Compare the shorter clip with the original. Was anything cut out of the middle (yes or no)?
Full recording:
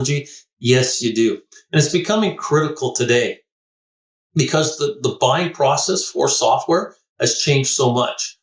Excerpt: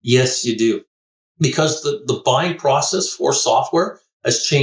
yes